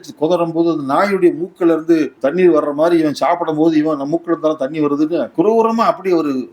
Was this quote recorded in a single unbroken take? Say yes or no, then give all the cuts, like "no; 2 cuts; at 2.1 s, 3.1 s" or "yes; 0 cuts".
no; 2 cuts; at 2.1 s, 5.3 s